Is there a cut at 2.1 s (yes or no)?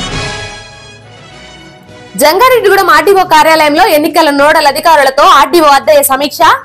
no